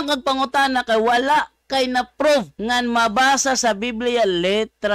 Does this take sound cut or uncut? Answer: cut